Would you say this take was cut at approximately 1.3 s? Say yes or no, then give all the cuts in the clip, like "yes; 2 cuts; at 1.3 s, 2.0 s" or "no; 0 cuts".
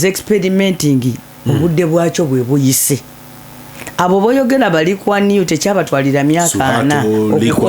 yes; 1 cut; at 1.3 s